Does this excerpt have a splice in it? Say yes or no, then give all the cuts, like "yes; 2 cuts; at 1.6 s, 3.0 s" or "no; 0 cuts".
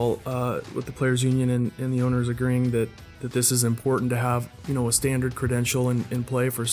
no; 0 cuts